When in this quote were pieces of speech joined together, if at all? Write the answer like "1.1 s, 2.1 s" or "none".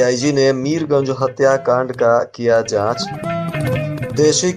none